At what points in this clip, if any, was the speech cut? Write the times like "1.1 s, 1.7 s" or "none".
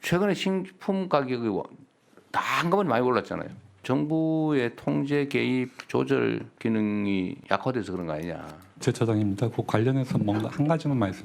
3.8 s, 6.5 s, 7.4 s, 8.8 s